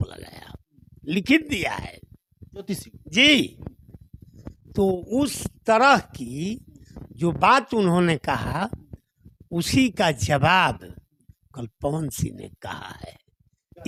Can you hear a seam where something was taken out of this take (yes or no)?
no